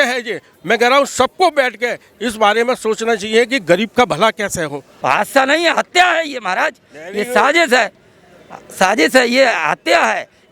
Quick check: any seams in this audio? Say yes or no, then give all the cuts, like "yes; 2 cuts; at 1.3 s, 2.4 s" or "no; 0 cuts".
yes; 1 cut; at 4.9 s